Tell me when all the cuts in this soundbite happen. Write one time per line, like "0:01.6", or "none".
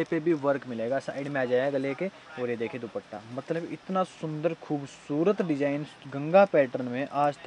none

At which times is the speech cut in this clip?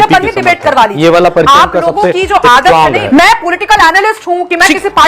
0:03.0

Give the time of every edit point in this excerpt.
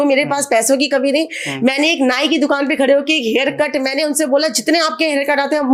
none

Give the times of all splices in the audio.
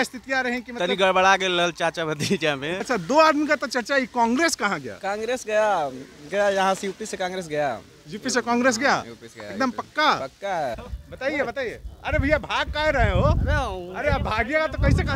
0:02.8
0:10.8

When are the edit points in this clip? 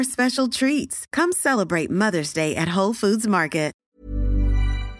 0:03.8

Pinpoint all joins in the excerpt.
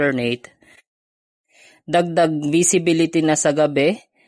none

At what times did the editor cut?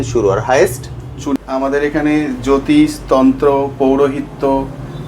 0:01.4

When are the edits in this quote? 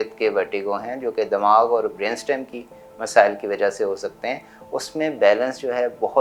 none

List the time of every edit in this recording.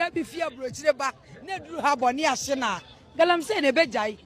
none

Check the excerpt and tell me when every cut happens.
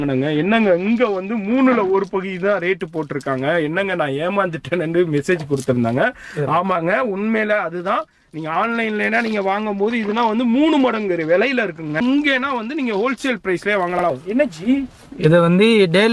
0:11.9
0:14.1

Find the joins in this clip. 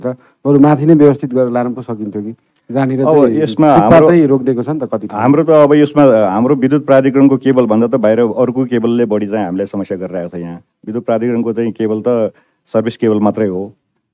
none

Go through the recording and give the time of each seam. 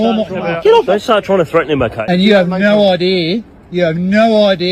0:00.9
0:02.0

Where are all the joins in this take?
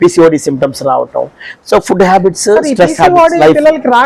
none

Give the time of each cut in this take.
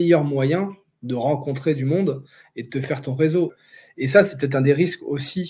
0:03.6

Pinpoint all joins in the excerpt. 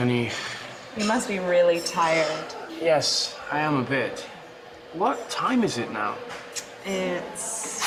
none

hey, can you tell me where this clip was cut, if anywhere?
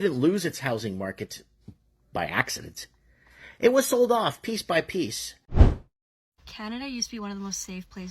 0:05.8

